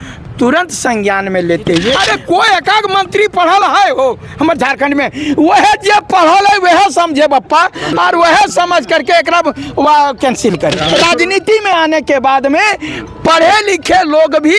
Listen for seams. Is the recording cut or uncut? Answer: cut